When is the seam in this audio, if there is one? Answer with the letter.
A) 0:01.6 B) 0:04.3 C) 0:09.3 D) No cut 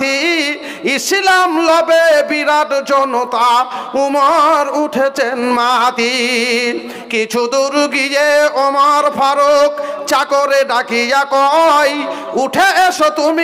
D